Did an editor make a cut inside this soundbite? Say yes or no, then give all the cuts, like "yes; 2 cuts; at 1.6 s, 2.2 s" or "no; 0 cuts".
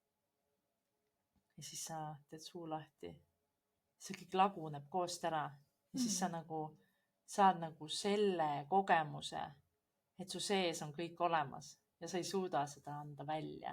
no; 0 cuts